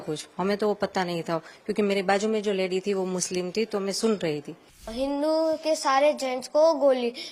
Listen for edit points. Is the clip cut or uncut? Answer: cut